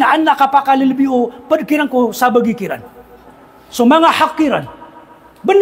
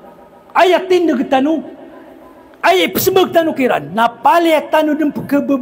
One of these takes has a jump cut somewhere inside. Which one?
first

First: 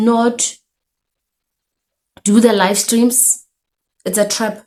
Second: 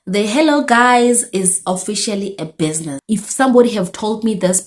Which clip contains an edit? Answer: second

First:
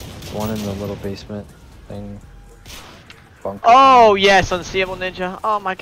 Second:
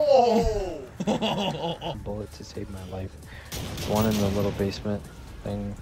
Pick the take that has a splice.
second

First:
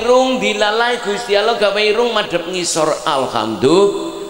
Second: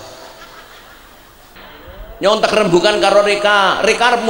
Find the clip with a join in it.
second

